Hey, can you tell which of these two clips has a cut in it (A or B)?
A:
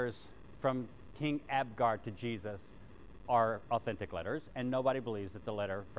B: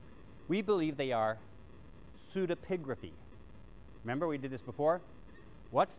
B